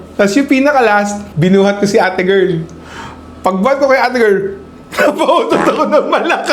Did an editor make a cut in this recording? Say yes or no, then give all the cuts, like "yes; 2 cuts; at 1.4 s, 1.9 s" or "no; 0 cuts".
no; 0 cuts